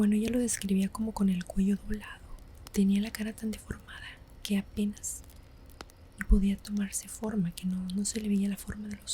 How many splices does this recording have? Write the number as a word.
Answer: one